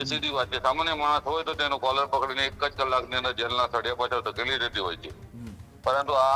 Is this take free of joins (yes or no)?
yes